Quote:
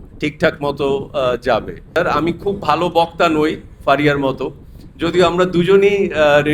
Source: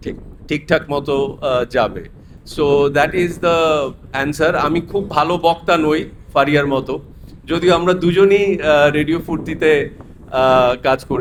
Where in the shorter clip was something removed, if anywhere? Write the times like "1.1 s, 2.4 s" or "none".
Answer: 2.0 s